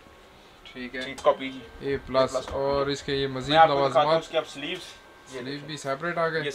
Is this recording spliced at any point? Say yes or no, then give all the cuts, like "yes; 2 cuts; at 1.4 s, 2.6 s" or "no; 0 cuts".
yes; 1 cut; at 1.2 s